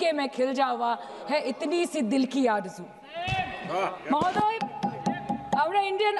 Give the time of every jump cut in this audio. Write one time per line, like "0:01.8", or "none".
none